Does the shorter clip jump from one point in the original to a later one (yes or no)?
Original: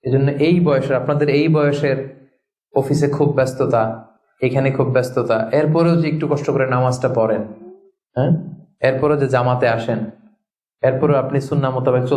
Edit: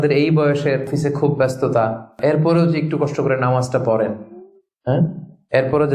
yes